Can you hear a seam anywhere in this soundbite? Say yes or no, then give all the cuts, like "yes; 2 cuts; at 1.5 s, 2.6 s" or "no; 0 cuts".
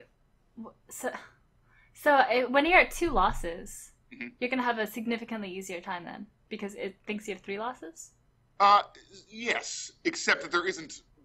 yes; 1 cut; at 10.0 s